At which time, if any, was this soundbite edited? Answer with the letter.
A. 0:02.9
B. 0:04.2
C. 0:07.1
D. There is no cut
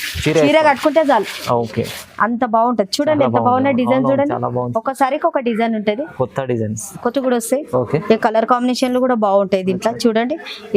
C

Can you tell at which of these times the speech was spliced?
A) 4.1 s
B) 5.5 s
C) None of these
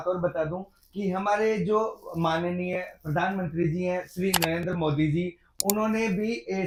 C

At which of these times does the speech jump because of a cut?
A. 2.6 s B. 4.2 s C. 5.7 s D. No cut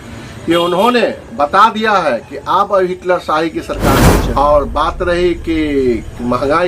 B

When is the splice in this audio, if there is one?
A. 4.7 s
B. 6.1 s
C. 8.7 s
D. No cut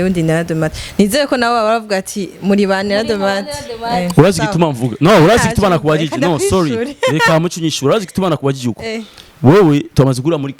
D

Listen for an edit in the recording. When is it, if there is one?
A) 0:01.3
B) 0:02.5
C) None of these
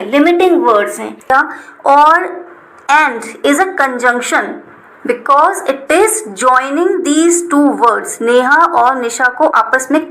A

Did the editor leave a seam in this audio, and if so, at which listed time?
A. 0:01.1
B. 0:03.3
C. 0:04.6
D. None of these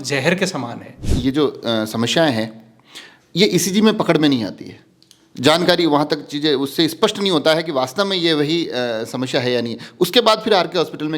A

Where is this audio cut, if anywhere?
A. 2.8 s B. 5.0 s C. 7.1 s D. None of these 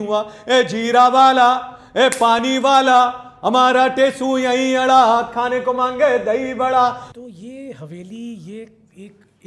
C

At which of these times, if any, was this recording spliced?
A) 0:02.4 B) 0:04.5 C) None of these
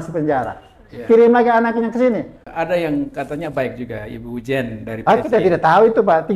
A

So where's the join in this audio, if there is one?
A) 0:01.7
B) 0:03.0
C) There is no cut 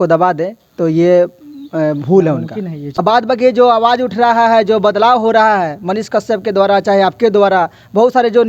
B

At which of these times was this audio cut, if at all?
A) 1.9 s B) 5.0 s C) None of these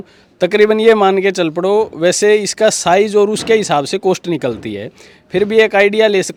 C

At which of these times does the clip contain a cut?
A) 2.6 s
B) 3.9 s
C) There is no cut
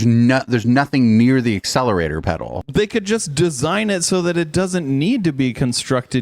A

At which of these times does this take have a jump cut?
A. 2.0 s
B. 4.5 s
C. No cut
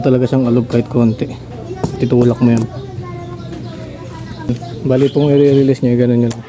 B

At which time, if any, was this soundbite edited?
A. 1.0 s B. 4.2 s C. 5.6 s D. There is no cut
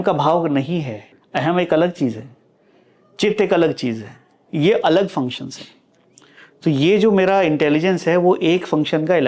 A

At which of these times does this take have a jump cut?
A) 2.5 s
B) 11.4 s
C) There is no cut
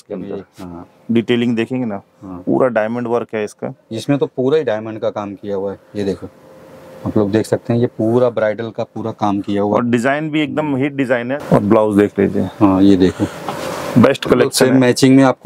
B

